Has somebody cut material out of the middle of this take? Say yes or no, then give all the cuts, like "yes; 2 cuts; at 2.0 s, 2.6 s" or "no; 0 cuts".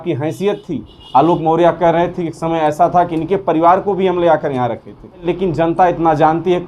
yes; 1 cut; at 5.3 s